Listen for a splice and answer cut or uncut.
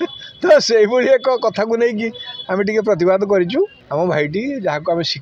cut